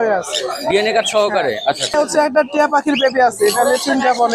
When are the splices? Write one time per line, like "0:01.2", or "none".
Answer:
0:01.9